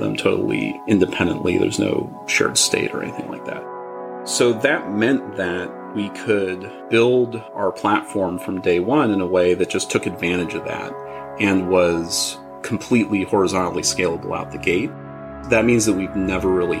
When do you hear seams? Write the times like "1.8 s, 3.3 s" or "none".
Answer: 15.4 s